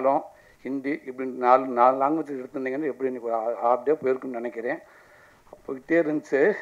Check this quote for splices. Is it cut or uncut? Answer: uncut